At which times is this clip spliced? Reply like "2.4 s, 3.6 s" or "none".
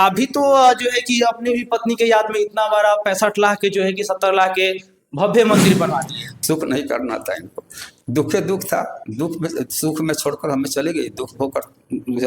6.2 s